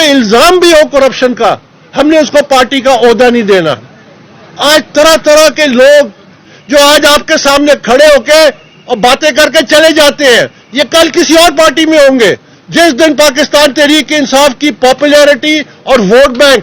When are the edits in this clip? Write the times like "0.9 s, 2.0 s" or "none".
6.5 s